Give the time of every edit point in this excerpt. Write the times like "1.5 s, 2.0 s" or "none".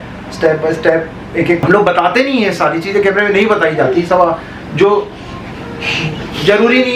1.6 s

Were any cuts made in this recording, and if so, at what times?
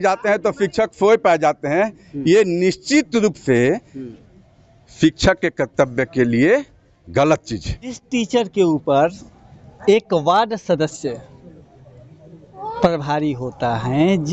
8.0 s

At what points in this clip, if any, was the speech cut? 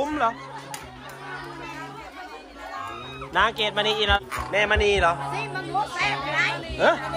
4.2 s

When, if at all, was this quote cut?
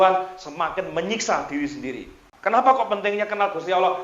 2.3 s

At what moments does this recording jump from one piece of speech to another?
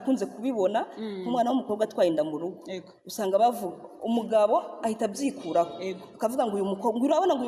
none

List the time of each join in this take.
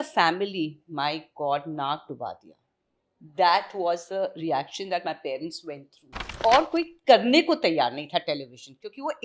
6.3 s

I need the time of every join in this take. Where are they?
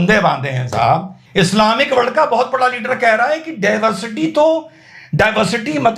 1.2 s

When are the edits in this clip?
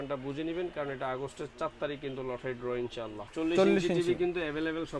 3.2 s

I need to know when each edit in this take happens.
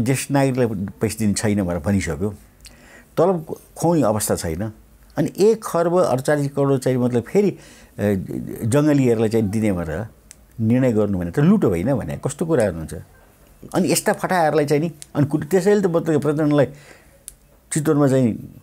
none

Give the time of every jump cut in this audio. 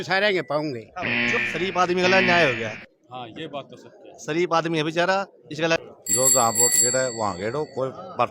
1.4 s, 5.8 s

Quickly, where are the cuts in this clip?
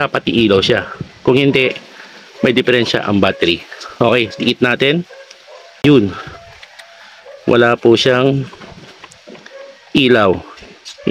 5.8 s

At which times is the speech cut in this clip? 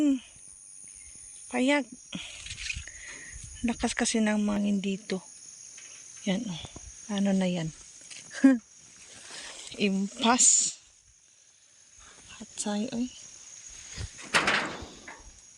4.6 s

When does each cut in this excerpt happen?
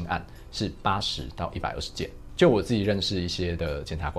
none

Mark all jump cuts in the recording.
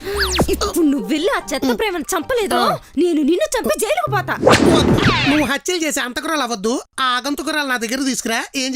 none

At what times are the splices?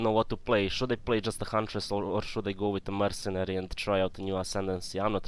none

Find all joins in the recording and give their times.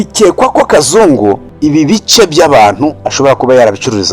1.5 s

